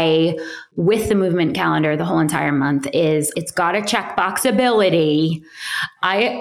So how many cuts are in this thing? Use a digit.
1